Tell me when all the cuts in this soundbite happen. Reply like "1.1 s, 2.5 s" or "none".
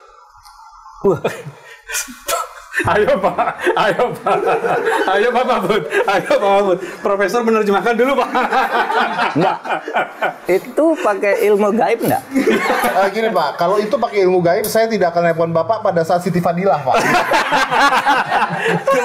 none

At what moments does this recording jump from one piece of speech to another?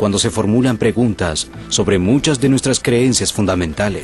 none

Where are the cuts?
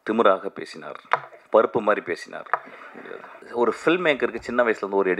1.3 s, 3.4 s

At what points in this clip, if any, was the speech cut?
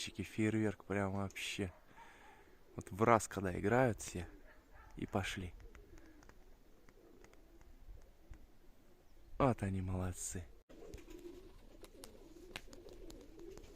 10.6 s

